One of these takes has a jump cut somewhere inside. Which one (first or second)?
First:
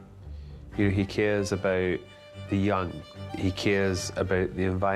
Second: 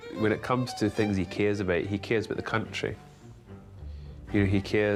first